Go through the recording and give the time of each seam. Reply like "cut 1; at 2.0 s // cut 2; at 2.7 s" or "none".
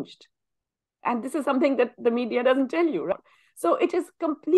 cut 1; at 3.1 s